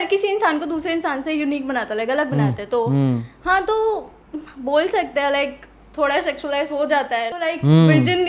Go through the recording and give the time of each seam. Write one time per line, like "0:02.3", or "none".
0:07.3